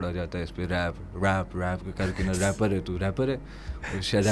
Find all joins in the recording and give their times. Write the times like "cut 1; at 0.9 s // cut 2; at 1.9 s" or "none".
none